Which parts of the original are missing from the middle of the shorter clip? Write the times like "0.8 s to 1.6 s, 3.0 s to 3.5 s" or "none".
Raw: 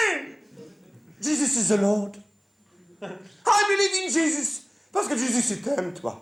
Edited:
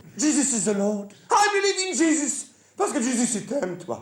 2.2 s to 3.3 s